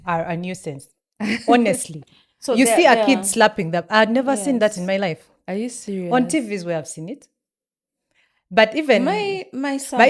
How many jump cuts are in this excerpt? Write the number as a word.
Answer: zero